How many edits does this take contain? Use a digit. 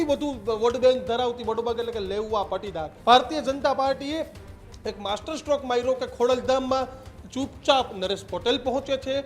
1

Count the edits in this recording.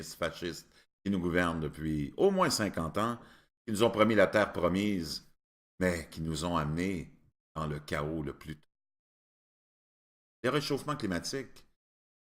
1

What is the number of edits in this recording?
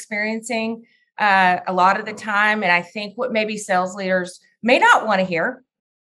0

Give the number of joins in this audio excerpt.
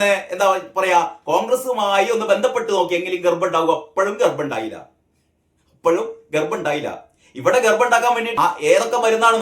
1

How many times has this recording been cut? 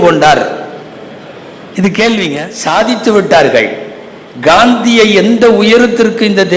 1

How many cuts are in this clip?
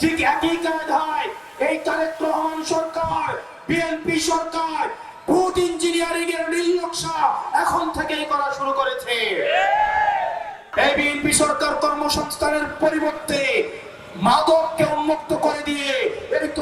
1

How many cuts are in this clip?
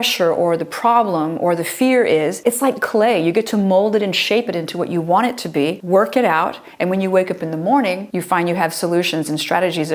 3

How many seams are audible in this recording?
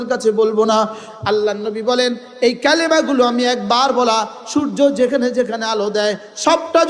1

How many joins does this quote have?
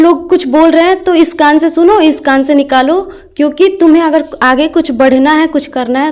0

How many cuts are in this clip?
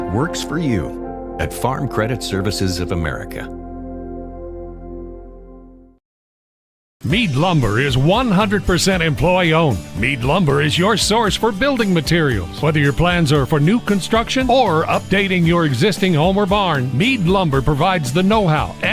1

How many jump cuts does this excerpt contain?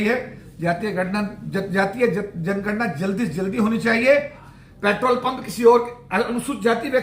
1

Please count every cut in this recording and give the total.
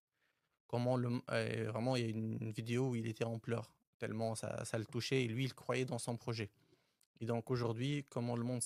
0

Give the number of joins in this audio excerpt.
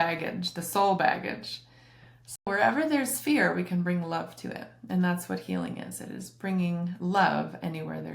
1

